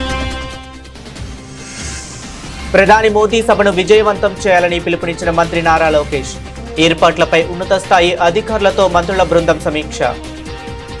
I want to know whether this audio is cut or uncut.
uncut